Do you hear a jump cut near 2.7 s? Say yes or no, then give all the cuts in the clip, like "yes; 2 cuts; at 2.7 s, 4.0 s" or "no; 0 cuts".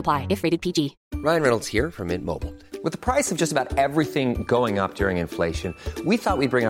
no; 1 cut; at 1.0 s